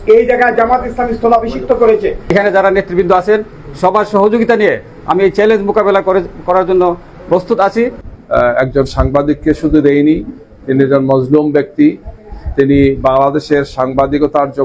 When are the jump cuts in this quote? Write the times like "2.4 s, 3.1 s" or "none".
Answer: 2.3 s, 8.0 s